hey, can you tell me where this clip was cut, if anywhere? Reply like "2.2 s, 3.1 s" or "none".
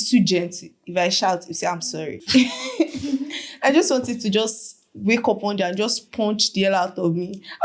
2.2 s